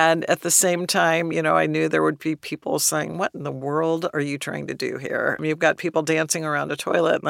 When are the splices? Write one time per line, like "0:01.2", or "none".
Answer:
0:05.4